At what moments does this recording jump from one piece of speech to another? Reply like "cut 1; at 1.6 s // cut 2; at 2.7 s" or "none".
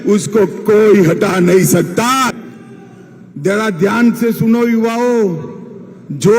cut 1; at 2.4 s